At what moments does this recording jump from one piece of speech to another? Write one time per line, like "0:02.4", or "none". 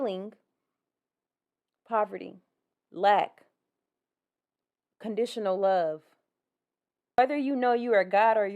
0:07.2